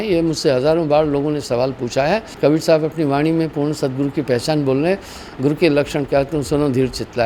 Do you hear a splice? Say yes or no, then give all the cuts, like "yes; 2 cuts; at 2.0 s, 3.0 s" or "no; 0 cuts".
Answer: yes; 1 cut; at 2.3 s